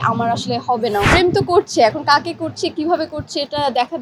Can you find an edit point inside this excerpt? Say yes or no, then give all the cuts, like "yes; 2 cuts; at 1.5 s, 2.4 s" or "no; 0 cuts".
yes; 1 cut; at 1.0 s